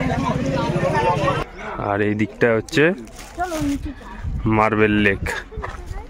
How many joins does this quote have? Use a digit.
1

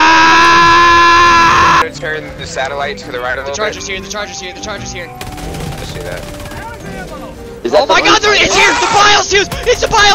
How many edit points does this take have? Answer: 1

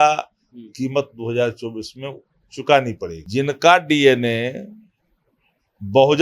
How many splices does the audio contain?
1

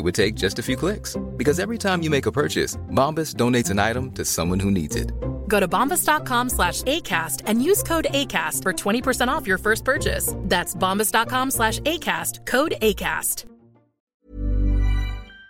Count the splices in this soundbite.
1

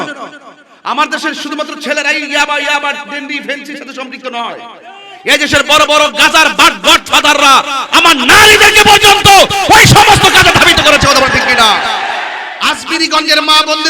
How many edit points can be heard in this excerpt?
1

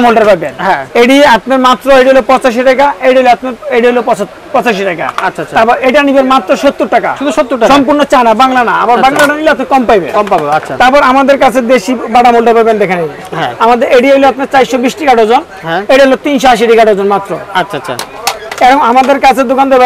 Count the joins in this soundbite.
0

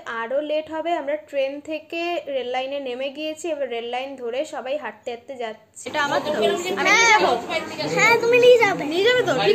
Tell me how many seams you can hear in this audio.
1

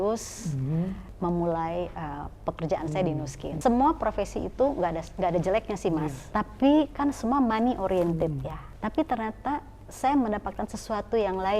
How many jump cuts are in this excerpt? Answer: 4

